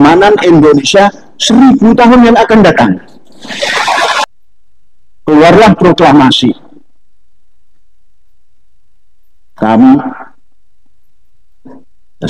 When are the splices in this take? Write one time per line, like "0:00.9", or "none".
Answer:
0:04.2